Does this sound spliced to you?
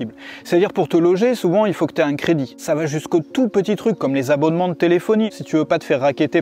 yes; 2 cuts; at 2.5 s, 5.4 s

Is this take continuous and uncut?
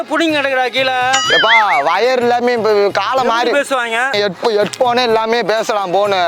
no; 1 cut; at 4.1 s

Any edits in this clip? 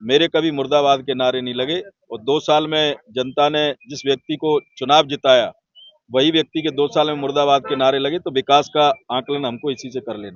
no; 0 cuts

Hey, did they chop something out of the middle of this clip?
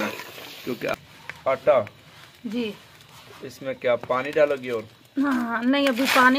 yes; 1 cut; at 0.9 s

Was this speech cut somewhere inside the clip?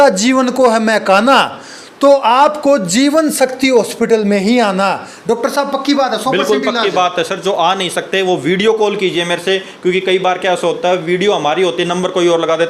no; 0 cuts

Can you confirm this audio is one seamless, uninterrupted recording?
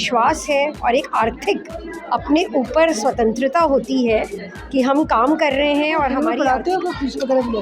no; 1 cut; at 6.2 s

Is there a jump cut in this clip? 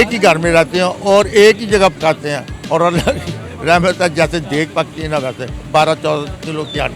yes; 1 cut; at 5.5 s

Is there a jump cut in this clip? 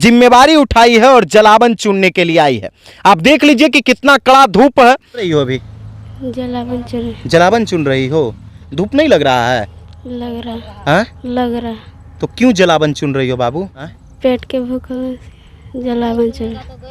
yes; 3 cuts; at 5.3 s, 8.6 s, 14.0 s

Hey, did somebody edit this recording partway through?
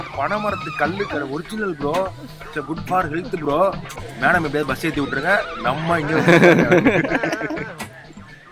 no; 0 cuts

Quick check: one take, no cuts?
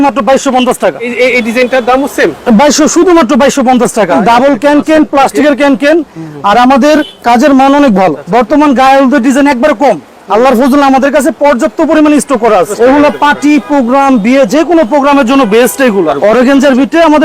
no; 5 cuts; at 1.1 s, 4.2 s, 8.2 s, 12.7 s, 16.1 s

